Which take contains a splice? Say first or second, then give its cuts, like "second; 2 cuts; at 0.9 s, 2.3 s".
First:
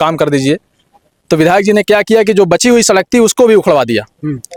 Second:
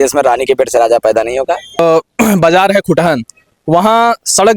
second; 1 cut; at 1.8 s